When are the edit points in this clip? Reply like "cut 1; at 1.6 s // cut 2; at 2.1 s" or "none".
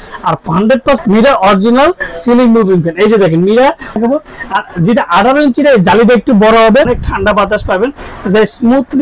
cut 1; at 1.0 s // cut 2; at 4.0 s // cut 3; at 7.0 s